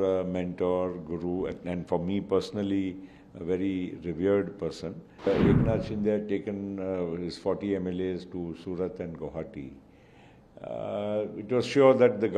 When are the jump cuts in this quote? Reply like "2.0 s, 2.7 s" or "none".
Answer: 5.3 s

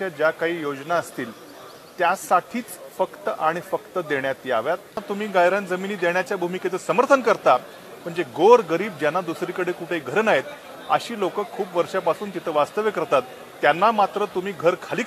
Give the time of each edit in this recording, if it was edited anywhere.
5.0 s

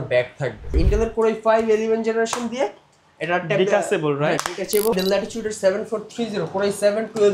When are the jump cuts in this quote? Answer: 0.8 s, 4.9 s

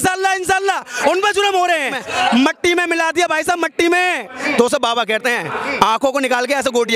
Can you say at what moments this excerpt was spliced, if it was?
2.0 s, 4.3 s

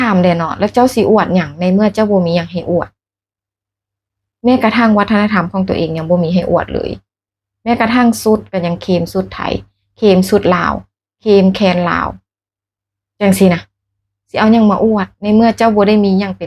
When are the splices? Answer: none

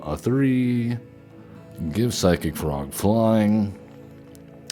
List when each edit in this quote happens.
none

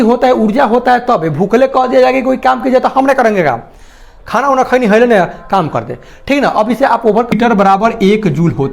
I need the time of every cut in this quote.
7.3 s

